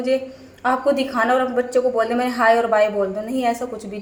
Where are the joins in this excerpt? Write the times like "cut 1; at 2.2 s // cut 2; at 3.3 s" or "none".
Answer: none